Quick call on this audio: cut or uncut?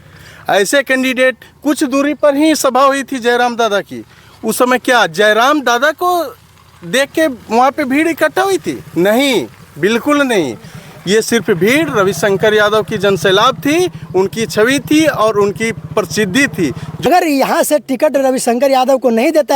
cut